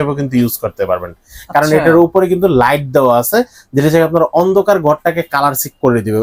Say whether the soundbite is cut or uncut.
uncut